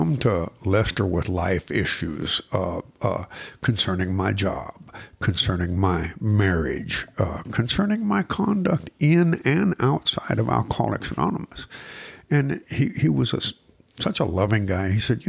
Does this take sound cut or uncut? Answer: uncut